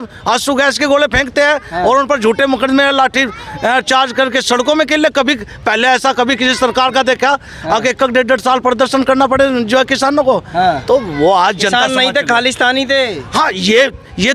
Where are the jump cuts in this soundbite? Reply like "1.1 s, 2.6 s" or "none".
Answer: none